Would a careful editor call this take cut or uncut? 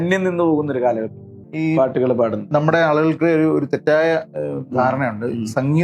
cut